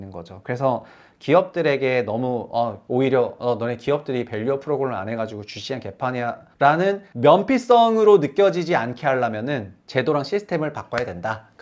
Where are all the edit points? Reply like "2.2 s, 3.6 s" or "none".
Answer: 2.8 s, 6.5 s, 7.1 s, 9.8 s